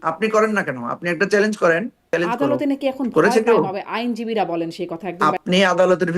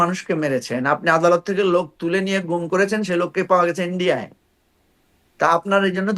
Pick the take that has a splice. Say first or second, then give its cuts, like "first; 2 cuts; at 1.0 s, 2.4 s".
first; 2 cuts; at 2.1 s, 5.1 s